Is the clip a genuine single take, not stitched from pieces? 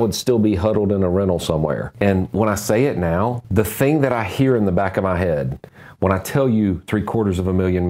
no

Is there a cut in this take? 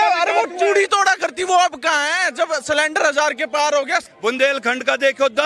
yes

